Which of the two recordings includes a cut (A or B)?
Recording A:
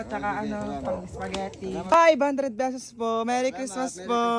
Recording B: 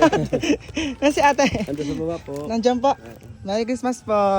A